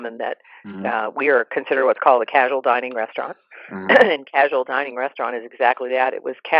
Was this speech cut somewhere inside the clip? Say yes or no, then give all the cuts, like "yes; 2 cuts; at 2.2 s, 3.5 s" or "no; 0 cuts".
no; 0 cuts